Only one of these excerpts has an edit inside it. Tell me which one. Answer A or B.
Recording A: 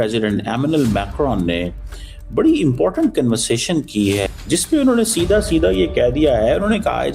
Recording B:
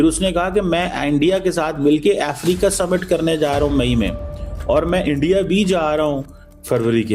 A